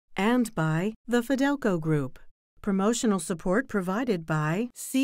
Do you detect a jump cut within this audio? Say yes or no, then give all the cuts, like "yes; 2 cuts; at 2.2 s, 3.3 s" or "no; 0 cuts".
yes; 1 cut; at 0.9 s